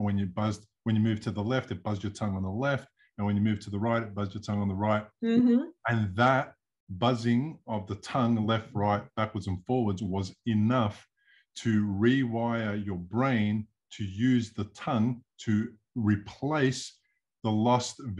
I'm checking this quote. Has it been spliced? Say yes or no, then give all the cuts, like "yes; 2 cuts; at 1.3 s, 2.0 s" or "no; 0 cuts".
no; 0 cuts